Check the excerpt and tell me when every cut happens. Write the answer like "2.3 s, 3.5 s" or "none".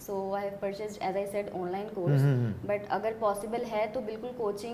none